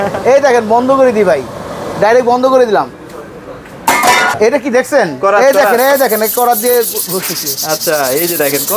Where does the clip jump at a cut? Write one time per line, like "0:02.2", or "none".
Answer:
0:04.3